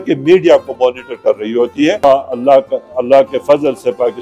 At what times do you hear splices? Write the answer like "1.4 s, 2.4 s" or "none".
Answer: 2.0 s